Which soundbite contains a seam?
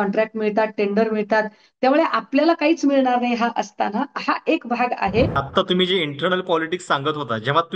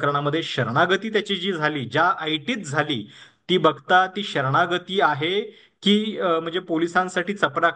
first; 1 cut; at 5.4 s

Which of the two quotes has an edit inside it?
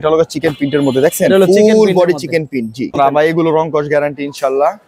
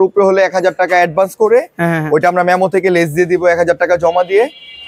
first; 1 cut; at 2.9 s

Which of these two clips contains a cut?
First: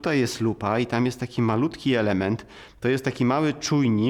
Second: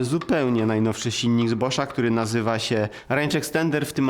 second; 1 cut; at 3.0 s

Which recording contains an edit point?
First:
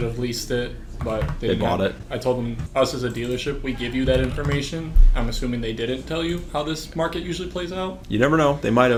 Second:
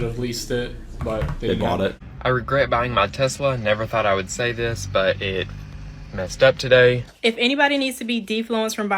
second; 2 cuts; at 2.1 s, 7.1 s

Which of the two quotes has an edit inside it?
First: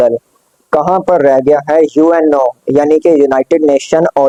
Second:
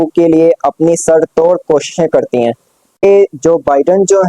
second; 1 cut; at 3.0 s

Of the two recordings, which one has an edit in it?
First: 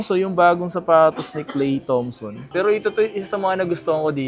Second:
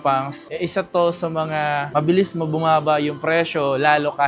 first; 1 cut; at 2.5 s

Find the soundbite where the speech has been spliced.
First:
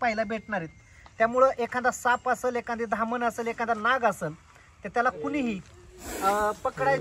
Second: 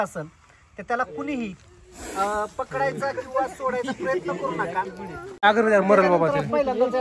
second; 1 cut; at 5.4 s

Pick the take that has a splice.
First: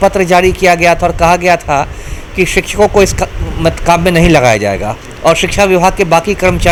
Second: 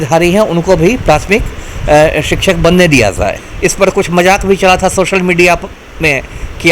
second; 1 cut; at 3.4 s

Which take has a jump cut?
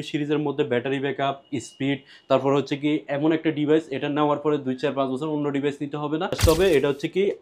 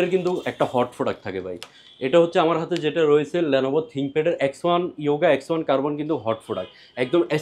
first; 1 cut; at 6.4 s

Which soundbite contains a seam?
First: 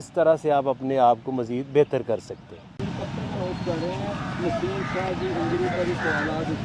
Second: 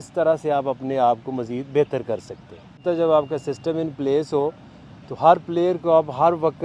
second; 1 cut; at 2.8 s

